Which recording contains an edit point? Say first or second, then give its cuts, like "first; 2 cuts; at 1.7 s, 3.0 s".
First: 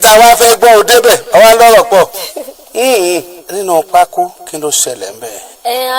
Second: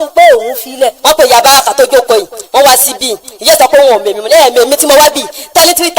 second; 1 cut; at 1.0 s